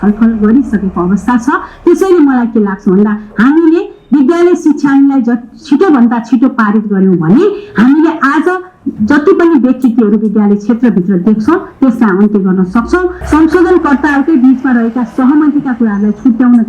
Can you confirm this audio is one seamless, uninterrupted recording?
no; 1 cut; at 13.1 s

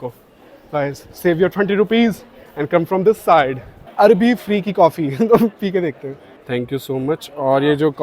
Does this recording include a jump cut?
yes; 2 cuts; at 3.8 s, 6.3 s

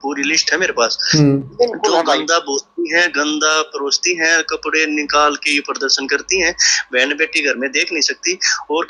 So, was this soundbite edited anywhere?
no; 0 cuts

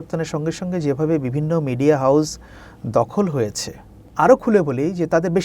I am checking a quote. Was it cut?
yes; 1 cut; at 4.0 s

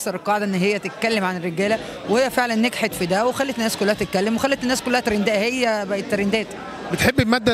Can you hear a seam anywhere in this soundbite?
no; 0 cuts

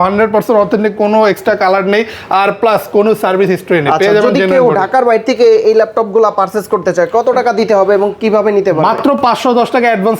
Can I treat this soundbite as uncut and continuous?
yes; 0 cuts

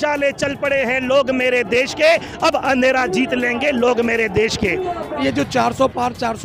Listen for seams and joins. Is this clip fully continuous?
no; 1 cut; at 5.2 s

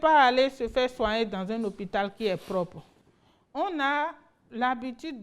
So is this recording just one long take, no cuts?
yes; 0 cuts

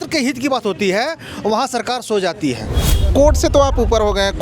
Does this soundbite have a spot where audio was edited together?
yes; 1 cut; at 3.1 s

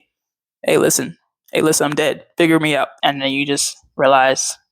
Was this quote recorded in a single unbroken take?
no; 1 cut; at 2.9 s

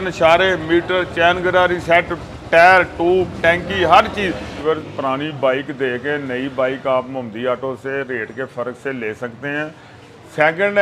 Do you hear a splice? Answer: yes; 1 cut; at 4.6 s

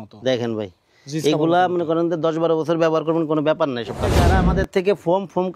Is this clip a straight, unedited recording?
no; 1 cut; at 4.3 s

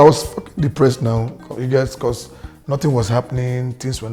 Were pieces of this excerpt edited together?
no; 0 cuts

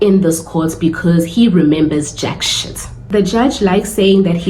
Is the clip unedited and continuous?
no; 1 cut; at 3.1 s

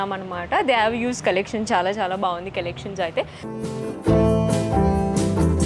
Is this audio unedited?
no; 1 cut; at 3.4 s

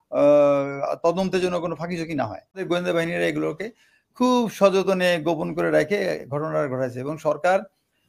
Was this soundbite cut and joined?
yes; 1 cut; at 2.6 s

